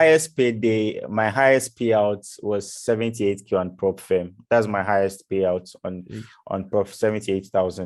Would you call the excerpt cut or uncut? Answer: uncut